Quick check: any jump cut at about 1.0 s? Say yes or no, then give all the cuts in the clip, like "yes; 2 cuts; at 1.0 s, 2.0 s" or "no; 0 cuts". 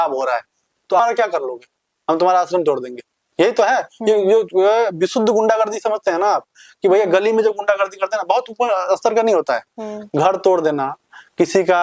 yes; 1 cut; at 1.0 s